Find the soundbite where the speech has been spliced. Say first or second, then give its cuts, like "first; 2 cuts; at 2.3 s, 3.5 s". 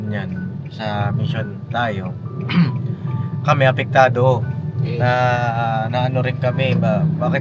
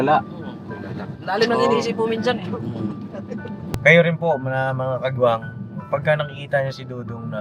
second; 1 cut; at 3.6 s